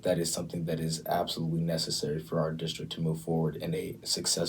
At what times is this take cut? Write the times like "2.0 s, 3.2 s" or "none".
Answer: none